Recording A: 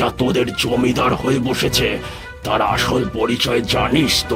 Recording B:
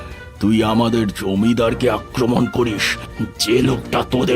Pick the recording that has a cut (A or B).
B